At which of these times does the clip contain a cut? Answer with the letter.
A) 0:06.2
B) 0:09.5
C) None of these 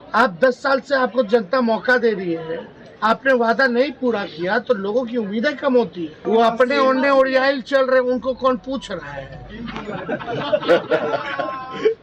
A